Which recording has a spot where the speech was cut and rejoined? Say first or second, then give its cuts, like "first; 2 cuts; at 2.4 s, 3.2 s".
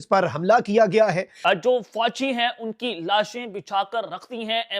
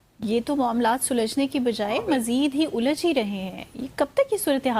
first; 1 cut; at 1.3 s